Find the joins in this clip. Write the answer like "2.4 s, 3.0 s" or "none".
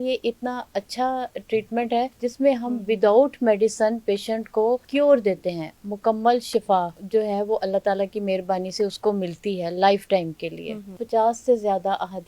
2.1 s, 4.9 s, 11.0 s